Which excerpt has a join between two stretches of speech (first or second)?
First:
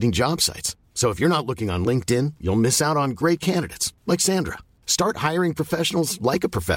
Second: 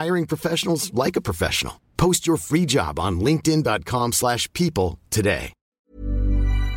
second